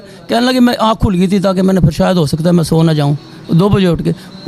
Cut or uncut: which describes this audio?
uncut